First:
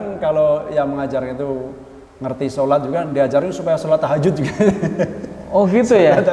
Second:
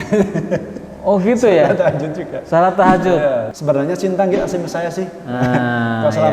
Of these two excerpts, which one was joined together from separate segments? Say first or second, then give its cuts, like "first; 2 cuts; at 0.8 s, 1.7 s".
second; 1 cut; at 3.5 s